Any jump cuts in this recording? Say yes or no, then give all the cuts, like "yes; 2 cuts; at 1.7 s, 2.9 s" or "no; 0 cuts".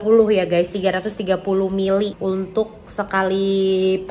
no; 0 cuts